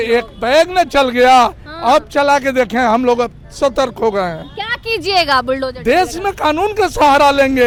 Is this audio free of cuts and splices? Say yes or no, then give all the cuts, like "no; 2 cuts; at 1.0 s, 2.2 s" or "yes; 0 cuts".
yes; 0 cuts